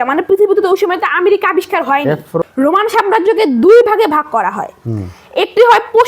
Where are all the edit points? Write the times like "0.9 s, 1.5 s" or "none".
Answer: 2.4 s